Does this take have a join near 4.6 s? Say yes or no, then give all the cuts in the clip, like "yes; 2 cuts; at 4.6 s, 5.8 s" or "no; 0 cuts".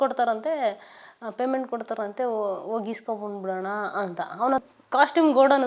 yes; 1 cut; at 4.6 s